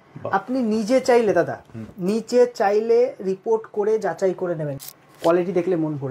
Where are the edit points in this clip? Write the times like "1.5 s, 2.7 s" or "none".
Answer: 4.8 s